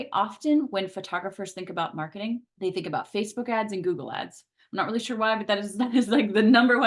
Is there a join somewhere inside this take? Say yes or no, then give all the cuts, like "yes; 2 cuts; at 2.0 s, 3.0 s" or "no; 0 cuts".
yes; 1 cut; at 2.5 s